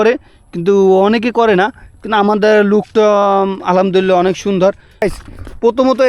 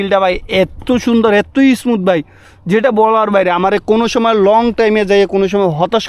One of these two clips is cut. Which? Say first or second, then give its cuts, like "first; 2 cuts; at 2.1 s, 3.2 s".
first; 1 cut; at 5.0 s